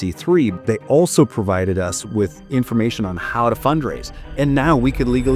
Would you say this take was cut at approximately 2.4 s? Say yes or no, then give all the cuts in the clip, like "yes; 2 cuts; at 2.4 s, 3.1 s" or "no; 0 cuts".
yes; 1 cut; at 2.4 s